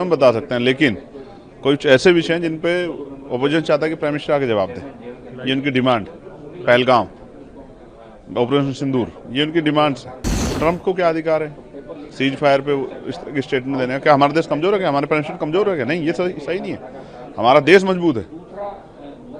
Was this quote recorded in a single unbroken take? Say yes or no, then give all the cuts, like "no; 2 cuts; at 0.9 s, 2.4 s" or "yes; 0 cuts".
no; 1 cut; at 10.4 s